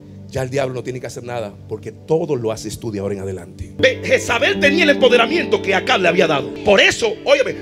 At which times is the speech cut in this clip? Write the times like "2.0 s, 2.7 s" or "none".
3.8 s, 6.5 s